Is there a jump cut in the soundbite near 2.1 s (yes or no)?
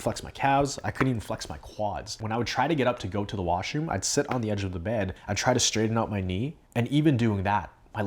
yes